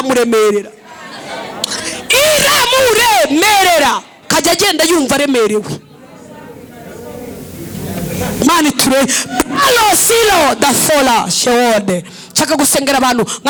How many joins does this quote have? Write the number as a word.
zero